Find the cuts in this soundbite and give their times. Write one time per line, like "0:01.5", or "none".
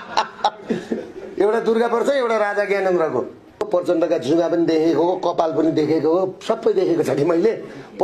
0:03.7